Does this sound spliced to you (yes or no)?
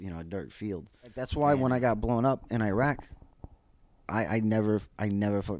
yes